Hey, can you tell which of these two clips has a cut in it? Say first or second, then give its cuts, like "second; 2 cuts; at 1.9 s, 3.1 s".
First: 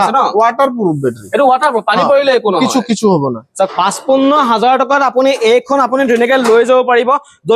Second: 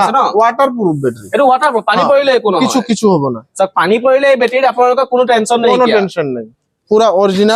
first; 1 cut; at 3.8 s